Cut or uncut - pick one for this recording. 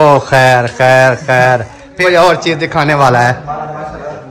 cut